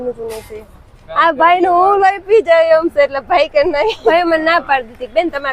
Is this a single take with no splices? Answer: no; 2 cuts; at 1.0 s, 4.1 s

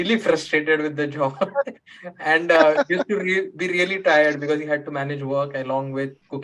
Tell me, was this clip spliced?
no; 0 cuts

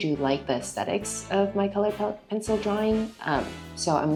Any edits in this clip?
no; 0 cuts

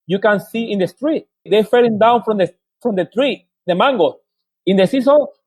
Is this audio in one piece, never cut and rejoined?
no; 1 cut; at 1.3 s

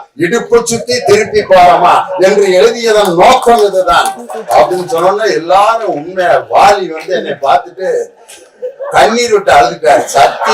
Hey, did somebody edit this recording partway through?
no; 0 cuts

